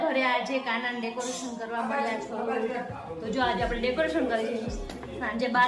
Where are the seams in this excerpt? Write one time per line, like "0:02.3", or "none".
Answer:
none